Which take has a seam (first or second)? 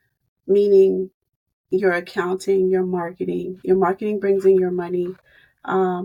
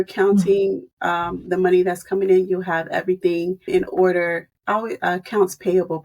second